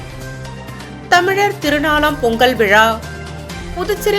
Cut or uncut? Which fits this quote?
cut